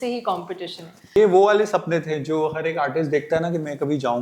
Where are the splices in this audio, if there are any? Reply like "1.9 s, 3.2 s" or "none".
1.1 s